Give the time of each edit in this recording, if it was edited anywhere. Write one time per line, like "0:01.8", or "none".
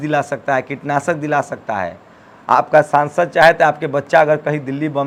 none